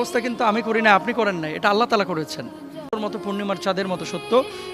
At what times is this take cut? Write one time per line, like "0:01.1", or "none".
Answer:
0:03.0

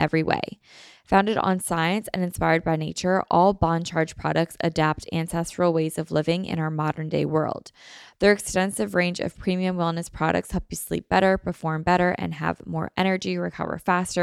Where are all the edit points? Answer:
none

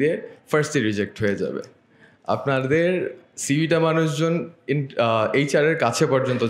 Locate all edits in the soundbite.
none

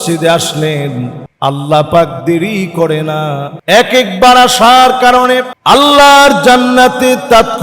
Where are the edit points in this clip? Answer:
0:01.2
0:03.5
0:05.5

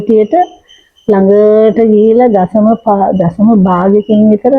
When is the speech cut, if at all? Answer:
none

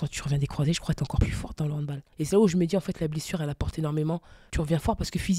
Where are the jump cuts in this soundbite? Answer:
0:01.5
0:04.4

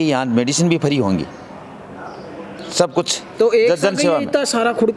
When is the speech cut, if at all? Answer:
none

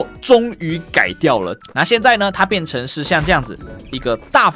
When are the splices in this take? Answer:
0:01.5

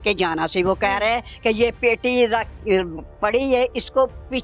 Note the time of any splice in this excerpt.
none

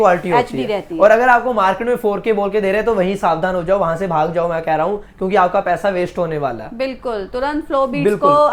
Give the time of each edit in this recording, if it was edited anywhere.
none

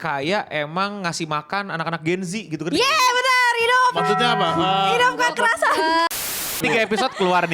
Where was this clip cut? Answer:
0:06.4

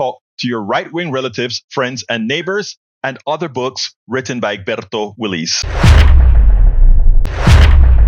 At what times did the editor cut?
0:05.7
0:07.2

